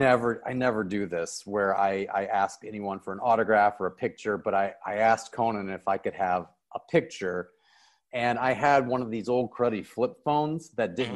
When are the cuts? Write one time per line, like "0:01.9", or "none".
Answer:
none